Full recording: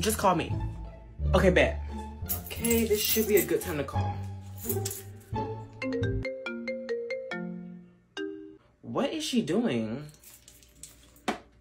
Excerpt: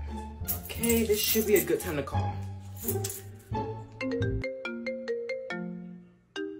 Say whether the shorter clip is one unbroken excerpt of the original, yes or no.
yes